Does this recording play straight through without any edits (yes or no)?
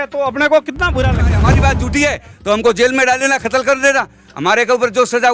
no